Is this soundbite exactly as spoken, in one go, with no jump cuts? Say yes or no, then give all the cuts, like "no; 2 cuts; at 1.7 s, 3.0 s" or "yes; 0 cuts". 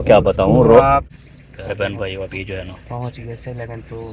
no; 1 cut; at 1.1 s